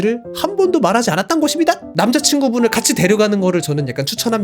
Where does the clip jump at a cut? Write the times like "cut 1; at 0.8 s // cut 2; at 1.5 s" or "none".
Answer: cut 1; at 1.9 s